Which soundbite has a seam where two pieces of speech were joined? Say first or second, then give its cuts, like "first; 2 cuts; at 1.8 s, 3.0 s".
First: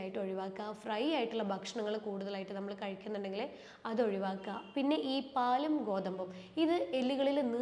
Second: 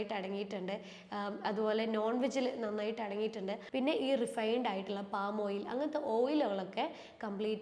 second; 1 cut; at 3.6 s